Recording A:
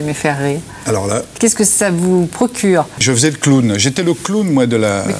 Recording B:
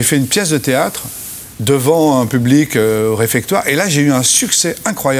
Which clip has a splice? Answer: A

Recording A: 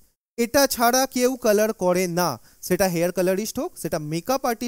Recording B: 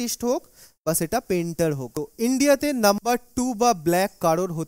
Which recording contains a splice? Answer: B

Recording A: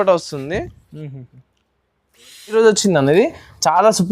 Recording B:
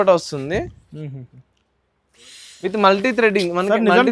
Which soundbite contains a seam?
A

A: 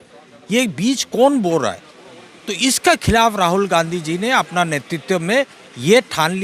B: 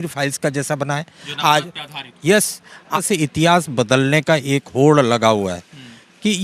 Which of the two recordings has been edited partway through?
B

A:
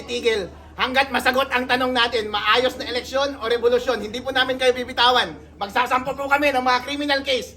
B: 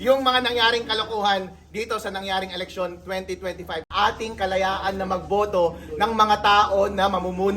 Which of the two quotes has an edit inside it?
B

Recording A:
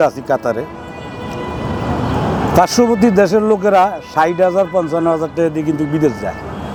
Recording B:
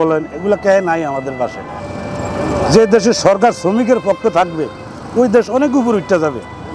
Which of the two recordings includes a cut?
B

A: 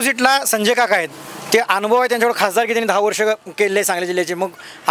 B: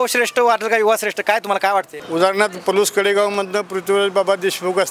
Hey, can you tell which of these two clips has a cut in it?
B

